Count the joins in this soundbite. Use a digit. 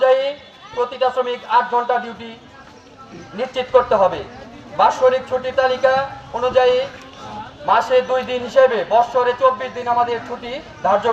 0